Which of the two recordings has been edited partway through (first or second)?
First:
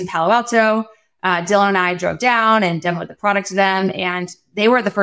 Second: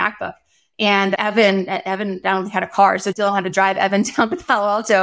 second